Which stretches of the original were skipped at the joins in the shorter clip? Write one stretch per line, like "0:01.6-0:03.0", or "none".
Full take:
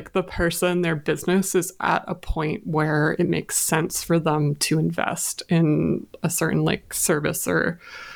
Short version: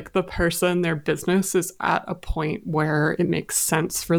none